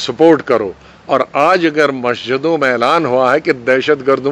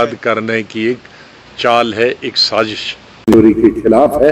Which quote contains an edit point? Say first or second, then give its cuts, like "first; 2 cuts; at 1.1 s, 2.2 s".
second; 1 cut; at 3.2 s